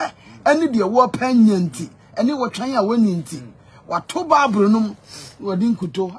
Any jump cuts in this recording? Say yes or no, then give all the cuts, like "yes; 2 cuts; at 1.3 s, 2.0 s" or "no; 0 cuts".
no; 0 cuts